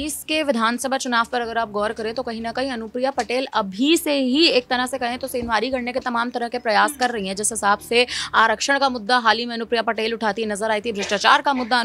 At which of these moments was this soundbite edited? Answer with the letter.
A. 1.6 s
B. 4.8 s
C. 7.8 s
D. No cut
D